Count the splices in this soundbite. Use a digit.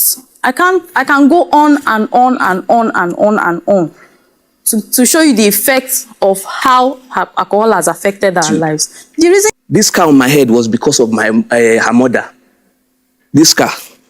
1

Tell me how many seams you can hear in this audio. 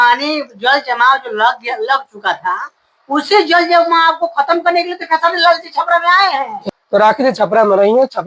1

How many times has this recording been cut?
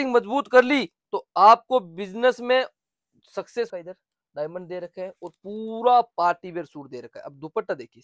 1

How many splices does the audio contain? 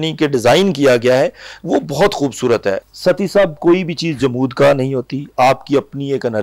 1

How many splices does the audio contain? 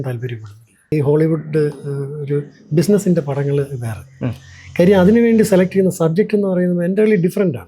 1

